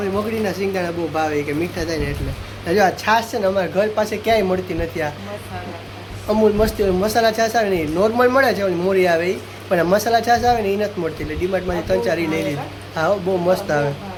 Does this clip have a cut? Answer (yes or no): no